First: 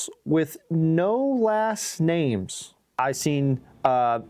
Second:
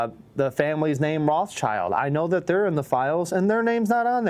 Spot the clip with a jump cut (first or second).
first